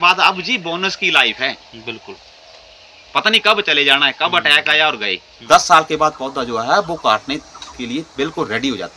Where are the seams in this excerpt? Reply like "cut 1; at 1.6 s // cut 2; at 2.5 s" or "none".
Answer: cut 1; at 5.4 s